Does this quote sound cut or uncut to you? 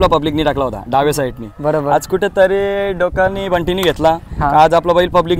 uncut